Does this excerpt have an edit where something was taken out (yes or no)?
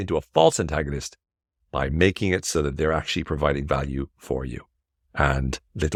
no